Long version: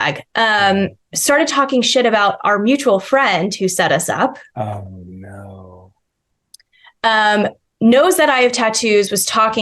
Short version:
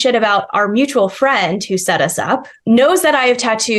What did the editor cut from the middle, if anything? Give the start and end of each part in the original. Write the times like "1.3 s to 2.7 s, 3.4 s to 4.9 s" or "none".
4.4 s to 7.7 s